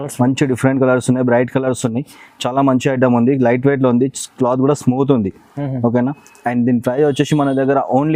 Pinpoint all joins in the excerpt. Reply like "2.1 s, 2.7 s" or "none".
none